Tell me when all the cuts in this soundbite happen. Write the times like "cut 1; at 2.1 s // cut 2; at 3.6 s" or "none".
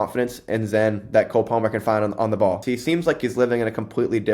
cut 1; at 2.6 s